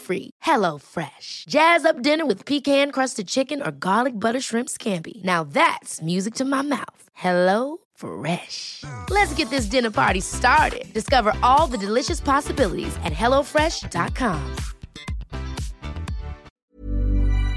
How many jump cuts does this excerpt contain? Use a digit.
1